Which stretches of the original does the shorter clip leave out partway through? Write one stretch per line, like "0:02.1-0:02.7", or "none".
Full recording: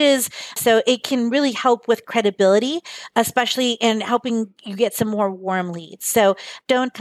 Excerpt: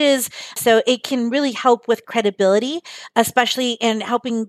none